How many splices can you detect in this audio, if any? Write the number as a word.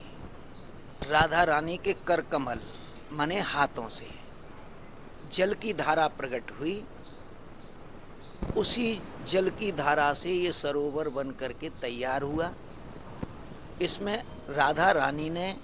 one